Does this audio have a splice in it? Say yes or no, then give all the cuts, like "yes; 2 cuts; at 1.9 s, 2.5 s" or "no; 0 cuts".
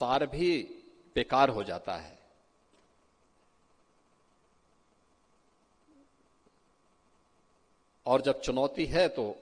no; 0 cuts